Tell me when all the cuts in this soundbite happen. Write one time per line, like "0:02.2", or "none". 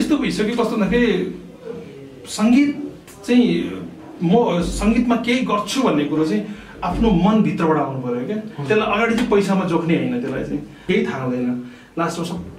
0:10.9